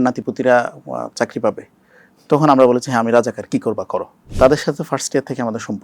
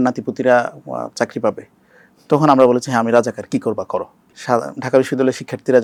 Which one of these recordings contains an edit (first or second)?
first